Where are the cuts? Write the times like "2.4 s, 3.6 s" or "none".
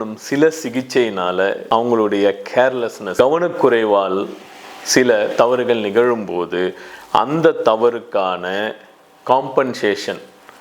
1.6 s, 3.0 s